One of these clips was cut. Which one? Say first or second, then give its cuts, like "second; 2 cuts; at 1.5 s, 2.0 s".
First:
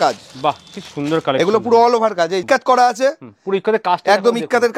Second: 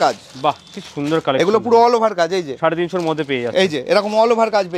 first; 1 cut; at 2.4 s